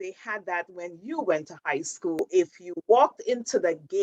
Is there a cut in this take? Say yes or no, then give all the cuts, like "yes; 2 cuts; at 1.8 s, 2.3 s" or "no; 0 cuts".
yes; 1 cut; at 2.2 s